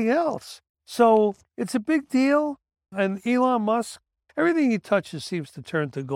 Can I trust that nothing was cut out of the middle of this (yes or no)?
no